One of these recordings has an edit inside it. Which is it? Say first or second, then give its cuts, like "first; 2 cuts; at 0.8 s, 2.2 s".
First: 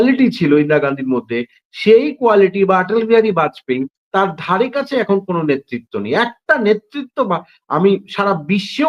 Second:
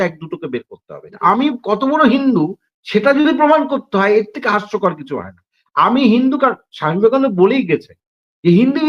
second; 1 cut; at 1.2 s